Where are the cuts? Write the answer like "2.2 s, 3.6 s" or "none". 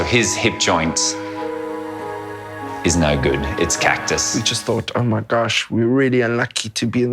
4.3 s